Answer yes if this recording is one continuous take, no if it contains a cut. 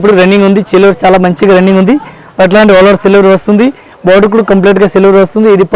yes